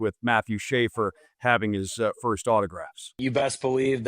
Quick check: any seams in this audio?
yes; 1 cut; at 3.2 s

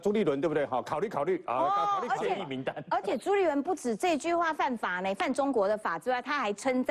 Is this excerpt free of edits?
yes; 0 cuts

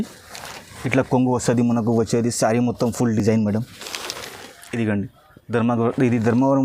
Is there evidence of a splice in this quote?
no; 0 cuts

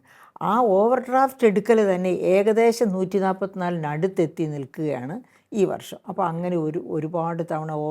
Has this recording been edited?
no; 0 cuts

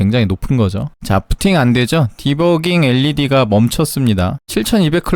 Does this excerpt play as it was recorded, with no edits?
no; 1 cut; at 0.9 s

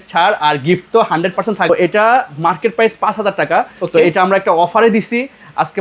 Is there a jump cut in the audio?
yes; 1 cut; at 1.7 s

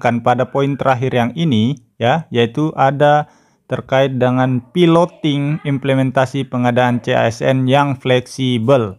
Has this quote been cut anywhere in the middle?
no; 0 cuts

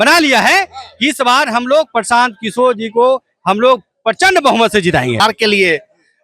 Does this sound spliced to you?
yes; 1 cut; at 5.2 s

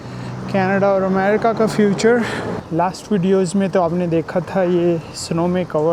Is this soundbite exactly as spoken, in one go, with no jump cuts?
no; 1 cut; at 2.5 s

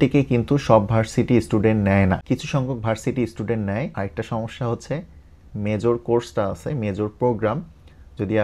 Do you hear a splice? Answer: yes; 1 cut; at 3.9 s

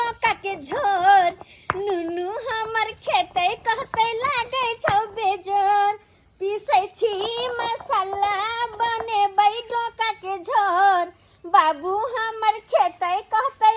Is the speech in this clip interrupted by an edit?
no; 0 cuts

